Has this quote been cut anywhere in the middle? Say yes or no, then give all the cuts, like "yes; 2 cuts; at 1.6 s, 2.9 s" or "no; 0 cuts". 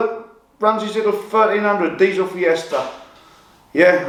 no; 0 cuts